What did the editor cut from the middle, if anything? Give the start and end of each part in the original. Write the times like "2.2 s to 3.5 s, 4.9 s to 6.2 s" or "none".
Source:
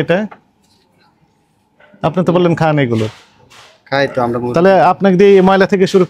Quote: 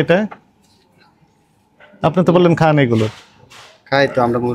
none